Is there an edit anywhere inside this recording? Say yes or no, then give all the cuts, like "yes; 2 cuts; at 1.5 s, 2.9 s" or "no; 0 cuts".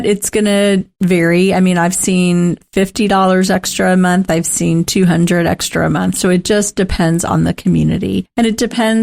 yes; 1 cut; at 0.9 s